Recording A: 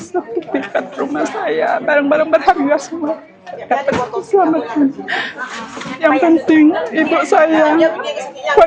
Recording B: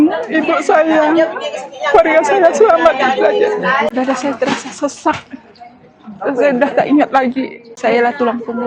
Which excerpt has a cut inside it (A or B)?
B